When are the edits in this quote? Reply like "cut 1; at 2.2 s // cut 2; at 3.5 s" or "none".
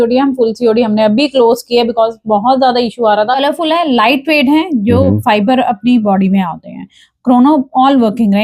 cut 1; at 3.4 s